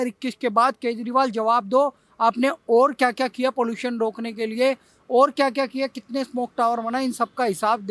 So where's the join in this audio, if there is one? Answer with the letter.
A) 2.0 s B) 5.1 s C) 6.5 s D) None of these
D